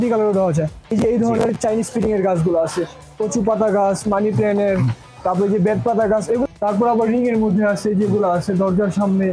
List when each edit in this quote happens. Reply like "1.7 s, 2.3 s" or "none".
0.9 s, 6.5 s